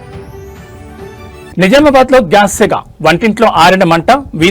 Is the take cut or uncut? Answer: cut